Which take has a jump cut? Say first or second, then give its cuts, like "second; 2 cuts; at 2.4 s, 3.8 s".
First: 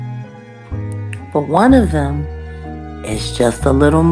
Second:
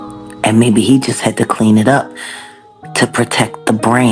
first; 1 cut; at 1.3 s